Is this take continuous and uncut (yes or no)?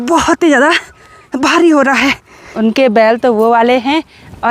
no